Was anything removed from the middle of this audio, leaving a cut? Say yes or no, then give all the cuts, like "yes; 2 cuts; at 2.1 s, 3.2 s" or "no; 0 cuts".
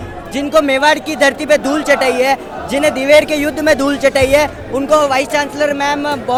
no; 0 cuts